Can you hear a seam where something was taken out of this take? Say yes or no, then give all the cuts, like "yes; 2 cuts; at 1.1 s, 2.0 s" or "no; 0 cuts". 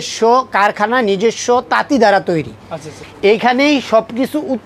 no; 0 cuts